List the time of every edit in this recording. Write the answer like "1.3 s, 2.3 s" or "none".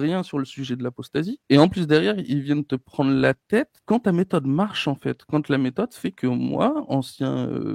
1.4 s, 3.8 s